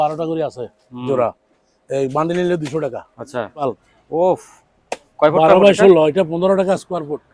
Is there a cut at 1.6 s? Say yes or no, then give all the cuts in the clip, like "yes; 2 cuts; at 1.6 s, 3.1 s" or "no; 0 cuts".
no; 1 cut; at 3.6 s